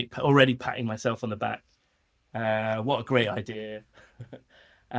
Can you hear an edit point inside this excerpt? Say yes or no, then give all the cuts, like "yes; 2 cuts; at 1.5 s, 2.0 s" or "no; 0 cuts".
no; 0 cuts